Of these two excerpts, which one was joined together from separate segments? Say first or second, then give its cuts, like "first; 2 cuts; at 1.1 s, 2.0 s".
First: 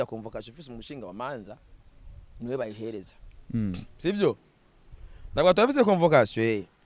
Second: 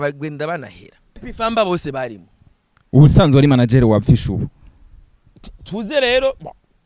second; 1 cut; at 1.3 s